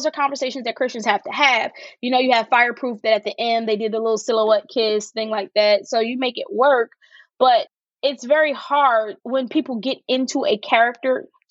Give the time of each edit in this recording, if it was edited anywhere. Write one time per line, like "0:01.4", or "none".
0:07.7
0:09.2